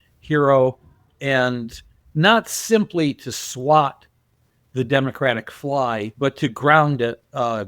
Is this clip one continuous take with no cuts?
no; 2 cuts; at 2.0 s, 6.1 s

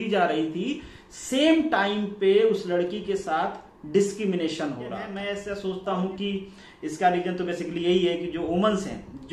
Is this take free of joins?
no; 1 cut; at 5.2 s

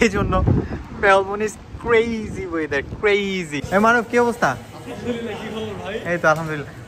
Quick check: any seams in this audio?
yes; 1 cut; at 3.6 s

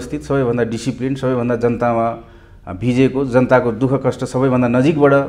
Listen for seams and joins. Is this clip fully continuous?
yes; 0 cuts

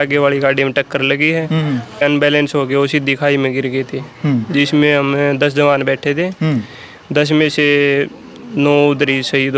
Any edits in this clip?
yes; 1 cut; at 2.0 s

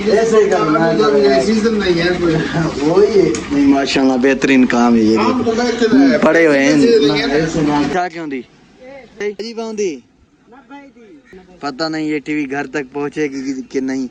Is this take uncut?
no; 3 cuts; at 7.9 s, 9.2 s, 11.3 s

